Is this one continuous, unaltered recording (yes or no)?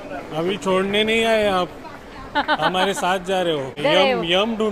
no